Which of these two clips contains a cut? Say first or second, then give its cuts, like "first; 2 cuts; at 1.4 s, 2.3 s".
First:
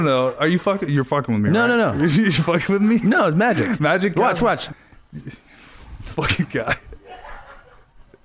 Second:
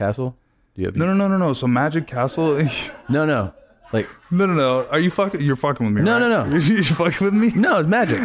first; 1 cut; at 4.7 s